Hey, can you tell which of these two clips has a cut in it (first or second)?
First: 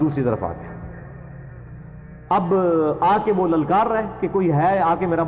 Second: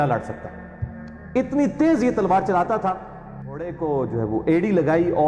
second